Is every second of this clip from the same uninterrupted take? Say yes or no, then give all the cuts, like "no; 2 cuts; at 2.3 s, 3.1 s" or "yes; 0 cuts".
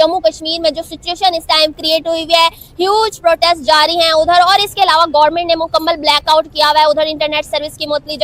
yes; 0 cuts